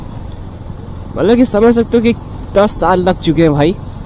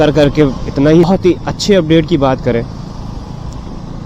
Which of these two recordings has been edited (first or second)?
second